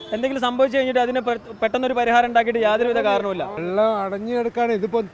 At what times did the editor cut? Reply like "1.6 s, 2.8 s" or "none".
3.5 s